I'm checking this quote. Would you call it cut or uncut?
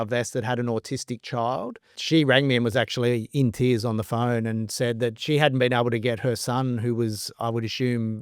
cut